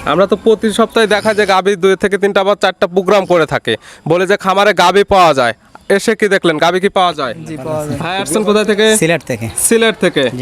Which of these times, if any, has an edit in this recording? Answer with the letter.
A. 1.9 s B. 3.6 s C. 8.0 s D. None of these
C